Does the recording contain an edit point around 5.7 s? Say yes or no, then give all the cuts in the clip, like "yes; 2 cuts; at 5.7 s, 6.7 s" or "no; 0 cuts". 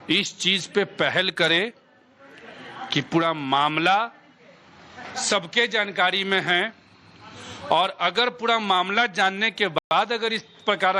no; 0 cuts